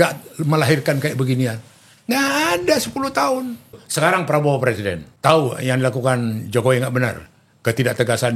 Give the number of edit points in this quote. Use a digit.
2